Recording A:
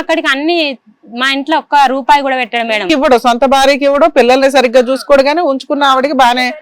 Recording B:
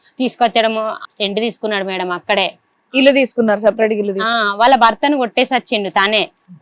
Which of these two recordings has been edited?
B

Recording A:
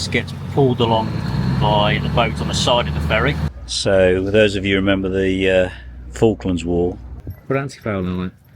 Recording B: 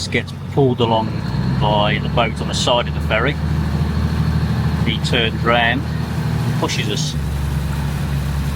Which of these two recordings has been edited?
A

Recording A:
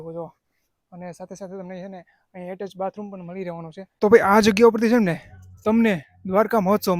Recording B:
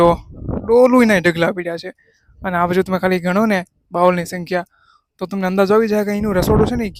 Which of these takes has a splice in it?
A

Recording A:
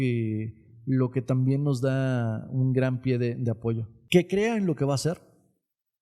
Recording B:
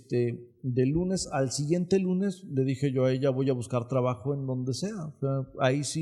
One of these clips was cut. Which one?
A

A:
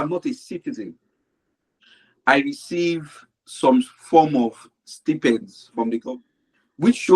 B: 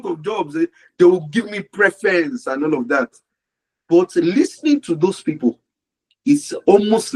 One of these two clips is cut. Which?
A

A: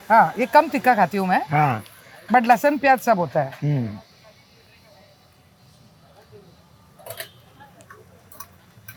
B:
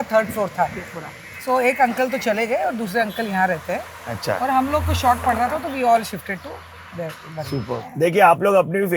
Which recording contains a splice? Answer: B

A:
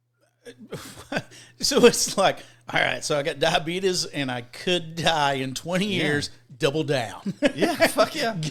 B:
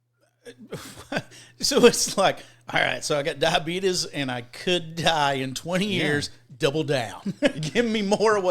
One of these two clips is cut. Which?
B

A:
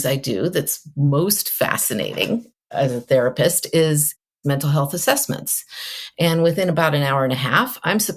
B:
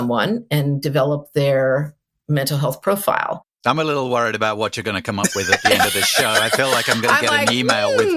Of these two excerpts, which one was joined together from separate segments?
A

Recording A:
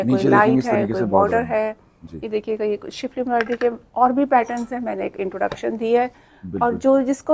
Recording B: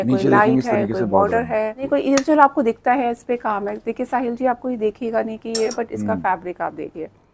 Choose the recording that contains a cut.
B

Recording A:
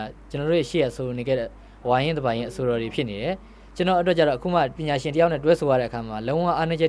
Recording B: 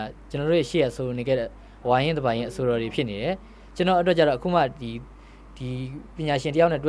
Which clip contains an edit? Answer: A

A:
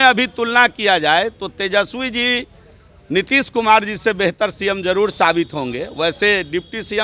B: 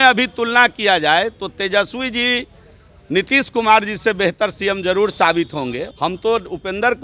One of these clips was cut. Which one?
B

